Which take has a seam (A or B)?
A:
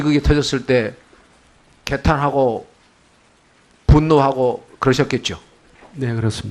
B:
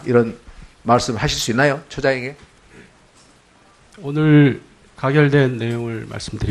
B